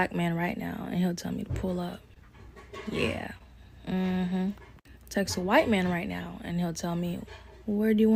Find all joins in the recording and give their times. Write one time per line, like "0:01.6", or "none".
none